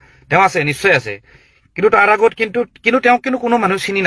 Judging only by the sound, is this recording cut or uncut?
uncut